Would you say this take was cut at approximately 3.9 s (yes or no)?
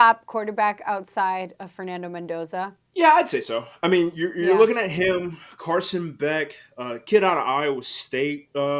no